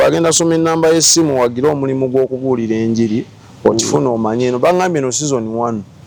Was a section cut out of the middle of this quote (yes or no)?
no